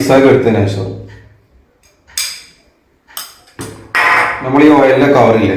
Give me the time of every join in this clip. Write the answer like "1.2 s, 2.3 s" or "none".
none